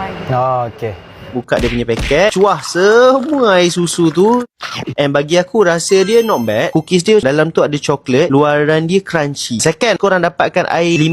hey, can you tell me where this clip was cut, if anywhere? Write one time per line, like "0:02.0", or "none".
0:01.4

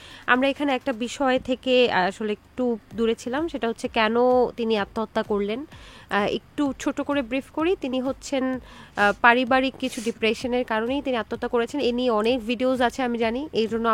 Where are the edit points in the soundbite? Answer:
none

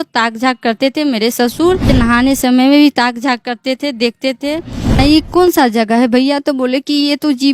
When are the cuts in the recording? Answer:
0:01.9
0:05.0

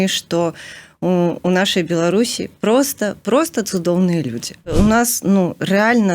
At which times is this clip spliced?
0:04.7

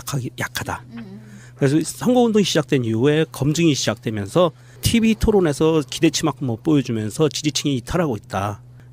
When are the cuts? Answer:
0:04.6

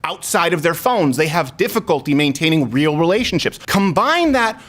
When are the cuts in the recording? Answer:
0:03.6

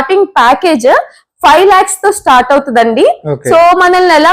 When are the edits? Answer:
none

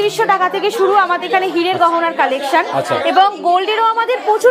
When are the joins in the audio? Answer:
none

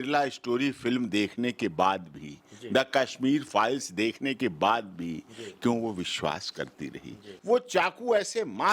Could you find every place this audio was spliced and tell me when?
0:07.3

